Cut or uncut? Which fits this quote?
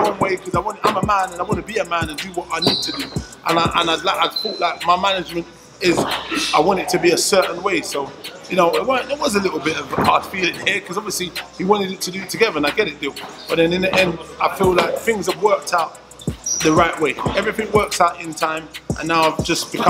uncut